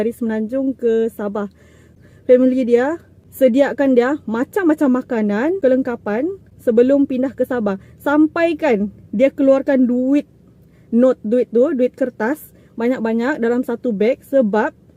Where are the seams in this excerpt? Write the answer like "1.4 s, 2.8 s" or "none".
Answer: 1.9 s

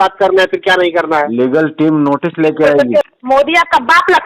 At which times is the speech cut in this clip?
3.1 s

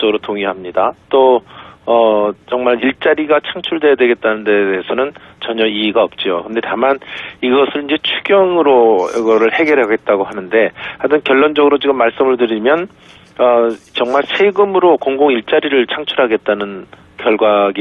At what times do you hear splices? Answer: 10.3 s

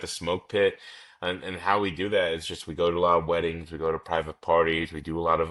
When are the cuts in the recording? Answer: none

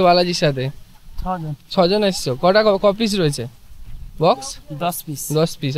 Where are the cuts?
none

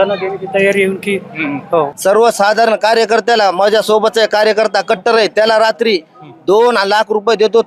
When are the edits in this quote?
1.9 s

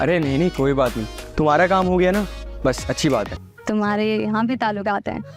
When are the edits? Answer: 3.4 s

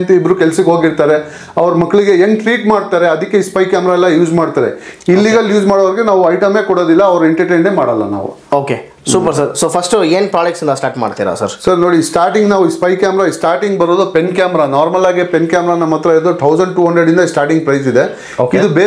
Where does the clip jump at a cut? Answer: none

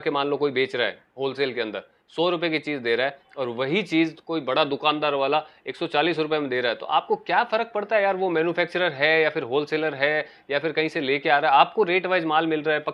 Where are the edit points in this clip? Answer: none

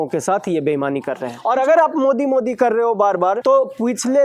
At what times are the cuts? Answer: 1.3 s, 3.4 s

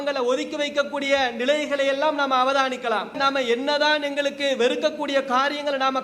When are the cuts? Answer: 3.2 s

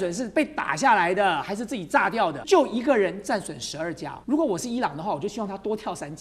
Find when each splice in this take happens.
2.4 s, 4.1 s

